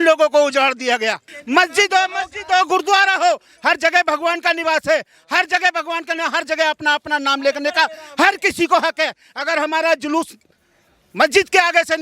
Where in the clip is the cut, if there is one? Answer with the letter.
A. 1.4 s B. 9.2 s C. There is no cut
A